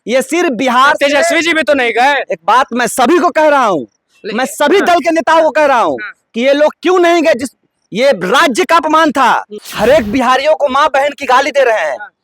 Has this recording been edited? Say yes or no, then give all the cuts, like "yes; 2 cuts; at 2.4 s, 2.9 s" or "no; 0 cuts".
yes; 1 cut; at 9.6 s